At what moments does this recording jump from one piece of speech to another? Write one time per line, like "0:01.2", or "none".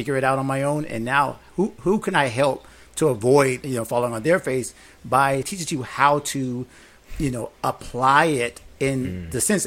0:03.6
0:05.5